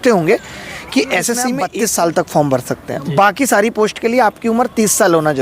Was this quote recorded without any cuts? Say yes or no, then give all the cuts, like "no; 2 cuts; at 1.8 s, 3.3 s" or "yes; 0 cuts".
no; 1 cut; at 1.6 s